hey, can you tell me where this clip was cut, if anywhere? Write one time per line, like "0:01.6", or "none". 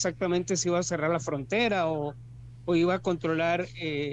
none